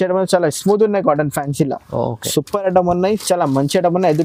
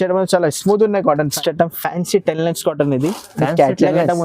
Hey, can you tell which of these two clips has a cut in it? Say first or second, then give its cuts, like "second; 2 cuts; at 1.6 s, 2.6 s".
second; 1 cut; at 1.3 s